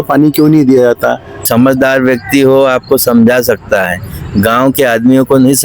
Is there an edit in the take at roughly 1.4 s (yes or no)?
yes